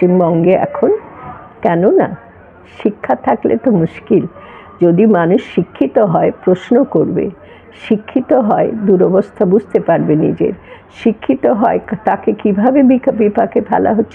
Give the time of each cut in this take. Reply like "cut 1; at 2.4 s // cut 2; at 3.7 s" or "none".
none